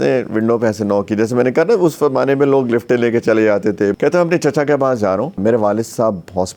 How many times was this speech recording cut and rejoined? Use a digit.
2